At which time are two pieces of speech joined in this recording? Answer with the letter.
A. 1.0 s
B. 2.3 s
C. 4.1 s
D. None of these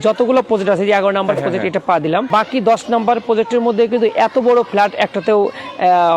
B